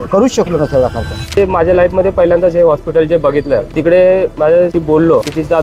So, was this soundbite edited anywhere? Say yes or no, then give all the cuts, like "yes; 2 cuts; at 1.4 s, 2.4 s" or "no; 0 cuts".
yes; 1 cut; at 1.4 s